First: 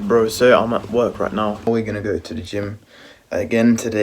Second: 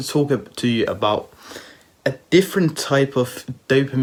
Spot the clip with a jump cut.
first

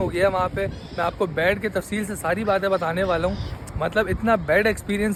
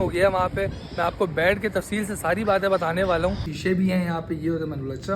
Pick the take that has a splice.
second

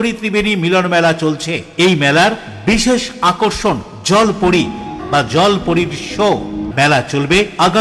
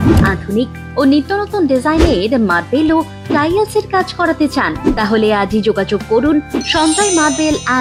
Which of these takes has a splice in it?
first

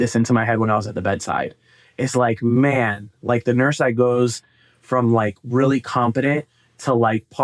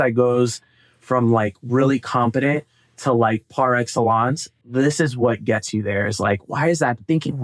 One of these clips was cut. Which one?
second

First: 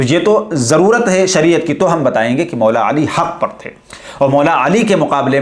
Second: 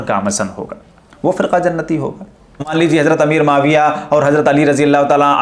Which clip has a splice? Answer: second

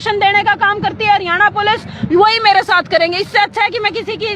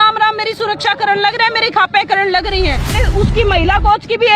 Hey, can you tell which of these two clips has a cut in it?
second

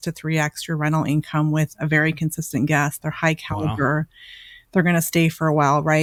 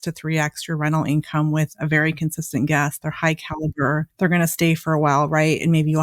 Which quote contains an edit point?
second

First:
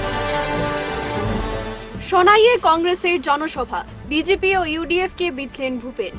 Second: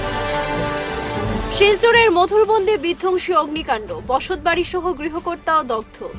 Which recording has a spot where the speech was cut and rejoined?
second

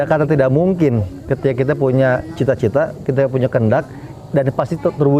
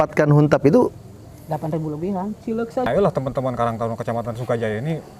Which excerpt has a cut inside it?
second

